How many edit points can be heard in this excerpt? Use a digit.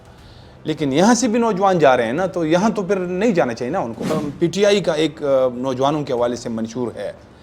1